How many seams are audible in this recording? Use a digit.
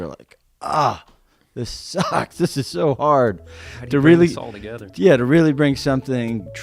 0